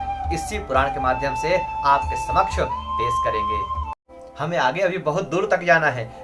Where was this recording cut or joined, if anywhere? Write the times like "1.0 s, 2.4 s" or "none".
4.0 s